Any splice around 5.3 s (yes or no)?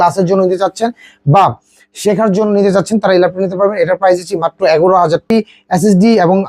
yes